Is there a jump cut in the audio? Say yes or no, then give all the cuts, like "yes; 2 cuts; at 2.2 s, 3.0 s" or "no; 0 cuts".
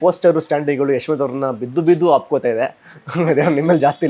no; 0 cuts